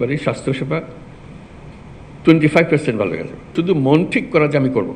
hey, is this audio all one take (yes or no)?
no